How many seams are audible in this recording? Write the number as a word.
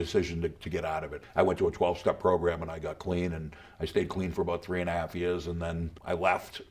one